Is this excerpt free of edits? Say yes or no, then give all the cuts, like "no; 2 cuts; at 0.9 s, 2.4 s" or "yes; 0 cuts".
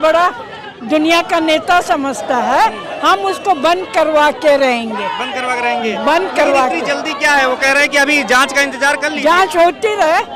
yes; 0 cuts